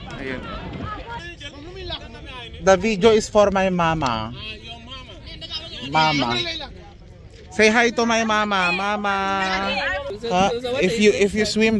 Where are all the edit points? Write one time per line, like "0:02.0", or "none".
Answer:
0:10.1